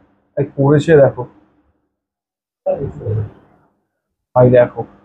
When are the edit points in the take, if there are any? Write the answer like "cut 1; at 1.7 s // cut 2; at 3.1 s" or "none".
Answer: none